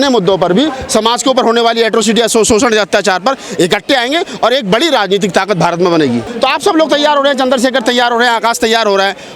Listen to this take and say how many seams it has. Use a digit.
1